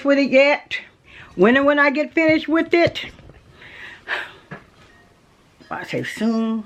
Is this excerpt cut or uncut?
uncut